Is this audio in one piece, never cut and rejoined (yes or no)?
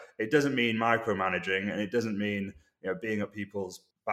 yes